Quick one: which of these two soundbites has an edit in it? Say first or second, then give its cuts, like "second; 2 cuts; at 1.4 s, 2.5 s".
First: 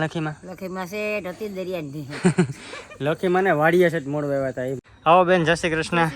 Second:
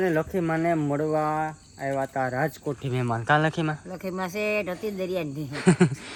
first; 1 cut; at 4.8 s